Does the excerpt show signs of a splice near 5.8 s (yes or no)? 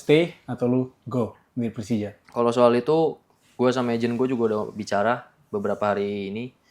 no